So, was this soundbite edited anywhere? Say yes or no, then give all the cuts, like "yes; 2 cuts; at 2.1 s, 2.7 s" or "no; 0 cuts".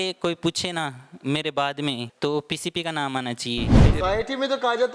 yes; 2 cuts; at 2.1 s, 3.7 s